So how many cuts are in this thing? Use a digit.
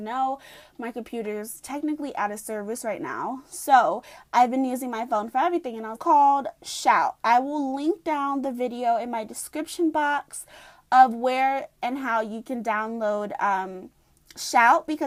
0